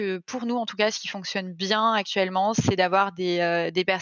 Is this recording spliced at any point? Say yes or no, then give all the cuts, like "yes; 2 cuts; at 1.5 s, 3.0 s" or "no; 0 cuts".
no; 0 cuts